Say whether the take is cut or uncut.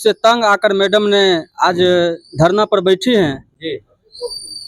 uncut